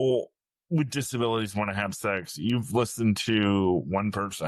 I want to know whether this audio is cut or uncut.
uncut